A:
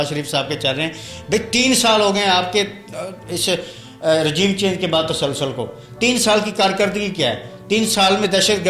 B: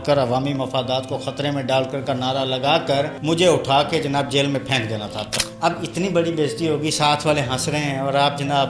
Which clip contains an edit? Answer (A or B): B